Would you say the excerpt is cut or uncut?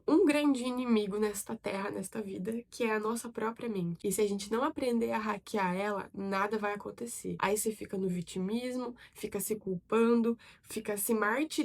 uncut